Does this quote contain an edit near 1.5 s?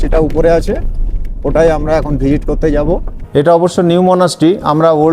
no; 1 cut; at 3.1 s

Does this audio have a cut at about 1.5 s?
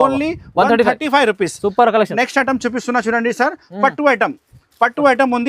no; 0 cuts

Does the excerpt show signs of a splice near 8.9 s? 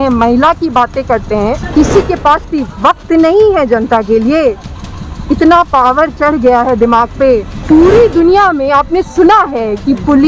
no; 2 cuts; at 1.6 s, 7.5 s

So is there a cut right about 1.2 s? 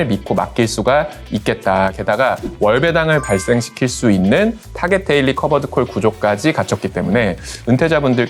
no; 0 cuts

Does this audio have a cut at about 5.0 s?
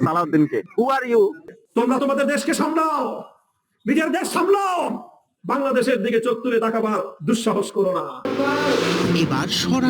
no; 2 cuts; at 1.5 s, 8.3 s

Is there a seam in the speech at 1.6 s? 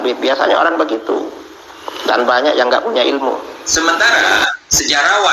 no; 1 cut; at 3.6 s

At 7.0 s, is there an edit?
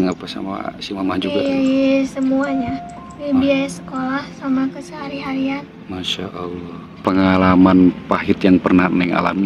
yes; 1 cut; at 7.0 s

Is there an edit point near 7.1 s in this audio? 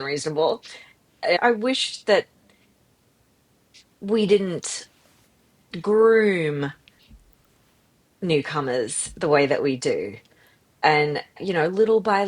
no; 2 cuts; at 1.4 s, 11.4 s

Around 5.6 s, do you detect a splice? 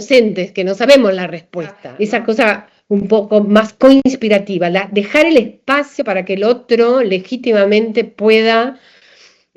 no; 2 cuts; at 0.8 s, 1.9 s

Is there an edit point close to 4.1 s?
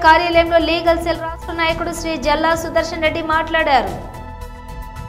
yes; 1 cut; at 4.1 s

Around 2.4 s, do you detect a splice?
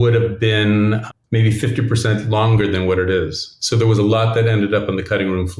no; 1 cut; at 1.1 s

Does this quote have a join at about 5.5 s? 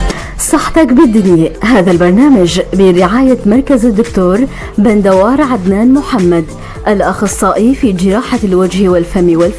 yes; 1 cut; at 5.5 s

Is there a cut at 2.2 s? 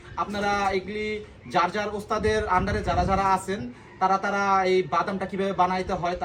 no; 0 cuts

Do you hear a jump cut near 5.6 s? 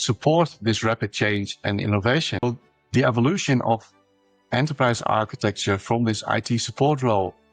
no; 1 cut; at 2.4 s

